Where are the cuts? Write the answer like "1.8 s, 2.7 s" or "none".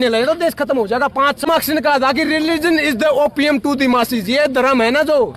1.5 s